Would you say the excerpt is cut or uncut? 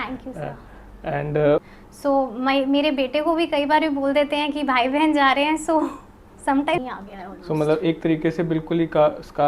cut